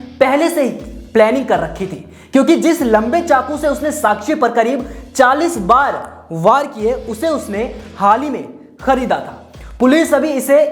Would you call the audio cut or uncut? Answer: uncut